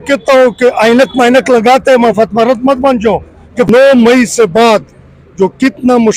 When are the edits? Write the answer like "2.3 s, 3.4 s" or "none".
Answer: 3.7 s